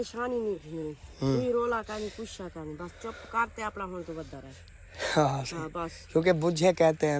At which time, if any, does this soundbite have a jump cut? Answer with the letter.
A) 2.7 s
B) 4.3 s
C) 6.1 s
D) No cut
D